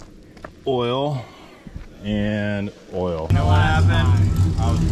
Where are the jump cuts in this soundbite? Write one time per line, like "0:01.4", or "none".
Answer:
0:03.3

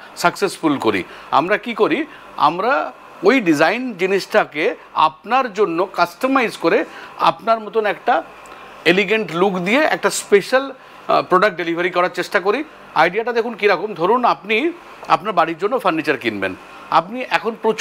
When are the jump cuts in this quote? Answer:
none

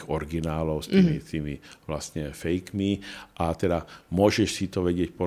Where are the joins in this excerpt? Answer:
none

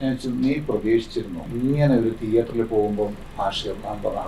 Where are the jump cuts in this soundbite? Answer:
0:01.4

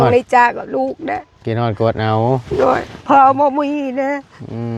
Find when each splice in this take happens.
none

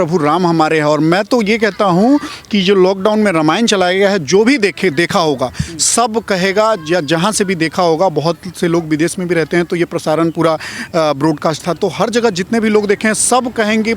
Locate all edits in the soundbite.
none

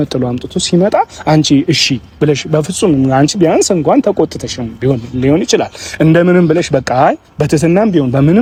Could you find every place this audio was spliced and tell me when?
none

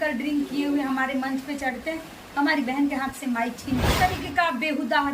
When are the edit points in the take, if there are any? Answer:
0:03.9

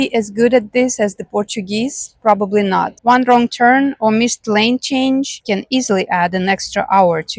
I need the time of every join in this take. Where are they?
0:02.9

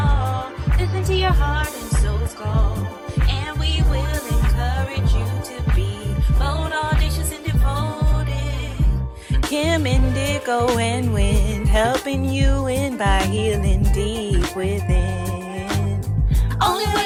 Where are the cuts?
none

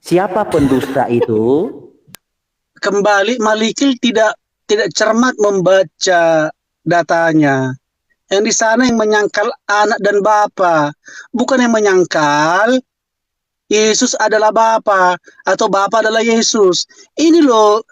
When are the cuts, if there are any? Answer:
0:02.0

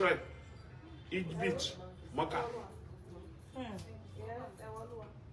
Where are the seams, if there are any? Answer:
none

